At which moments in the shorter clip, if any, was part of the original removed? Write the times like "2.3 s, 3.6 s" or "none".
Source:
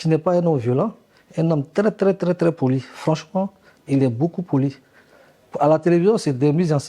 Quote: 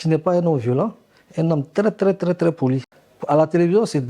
2.9 s